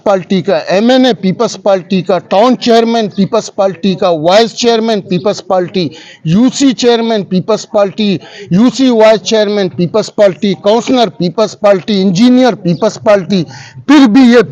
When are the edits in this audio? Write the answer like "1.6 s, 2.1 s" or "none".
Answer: none